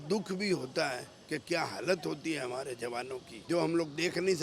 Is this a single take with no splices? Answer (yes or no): no